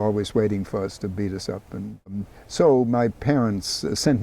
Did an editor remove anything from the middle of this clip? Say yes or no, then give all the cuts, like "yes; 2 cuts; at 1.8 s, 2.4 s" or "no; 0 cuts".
yes; 1 cut; at 2.2 s